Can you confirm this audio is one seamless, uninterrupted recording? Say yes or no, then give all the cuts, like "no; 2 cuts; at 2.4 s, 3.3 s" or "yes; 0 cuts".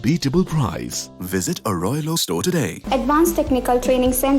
no; 1 cut; at 2.8 s